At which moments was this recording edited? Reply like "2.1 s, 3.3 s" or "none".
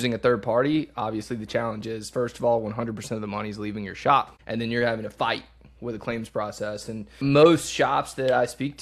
7.2 s

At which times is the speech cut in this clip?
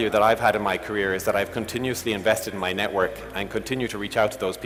none

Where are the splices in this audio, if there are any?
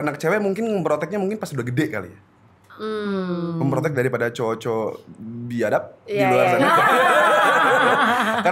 none

